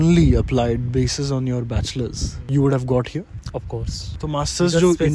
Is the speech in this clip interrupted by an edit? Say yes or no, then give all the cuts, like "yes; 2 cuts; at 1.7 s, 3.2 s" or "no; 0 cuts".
no; 0 cuts